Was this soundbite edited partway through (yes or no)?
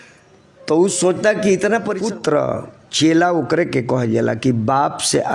yes